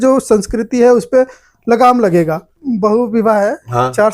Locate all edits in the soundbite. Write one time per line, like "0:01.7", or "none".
0:02.5